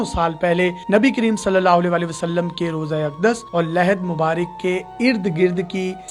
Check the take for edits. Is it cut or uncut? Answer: uncut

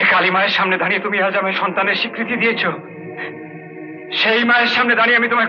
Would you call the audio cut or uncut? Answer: uncut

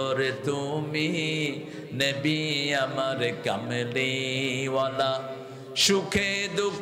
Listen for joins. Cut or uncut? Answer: uncut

